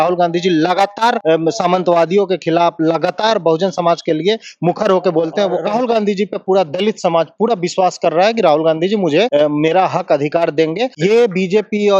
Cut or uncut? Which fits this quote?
cut